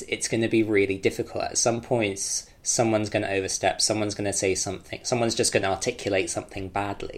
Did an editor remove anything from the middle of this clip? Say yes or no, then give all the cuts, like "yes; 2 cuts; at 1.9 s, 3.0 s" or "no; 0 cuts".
no; 0 cuts